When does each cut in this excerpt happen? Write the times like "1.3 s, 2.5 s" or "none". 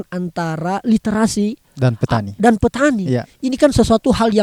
none